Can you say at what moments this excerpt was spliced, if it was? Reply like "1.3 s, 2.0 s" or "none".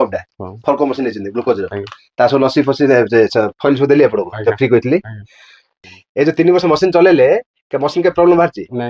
5.8 s